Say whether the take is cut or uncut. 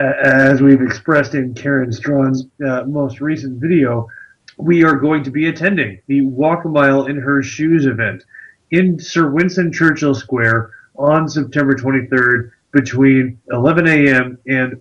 uncut